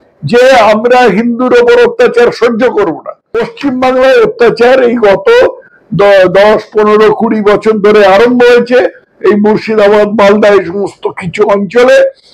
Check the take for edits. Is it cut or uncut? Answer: cut